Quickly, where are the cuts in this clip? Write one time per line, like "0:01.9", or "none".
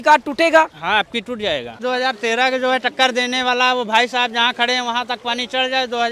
0:01.8